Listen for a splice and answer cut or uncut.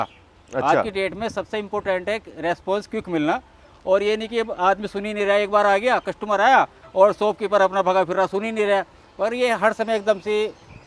uncut